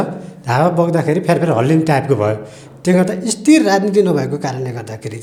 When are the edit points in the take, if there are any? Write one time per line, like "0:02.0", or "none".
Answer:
none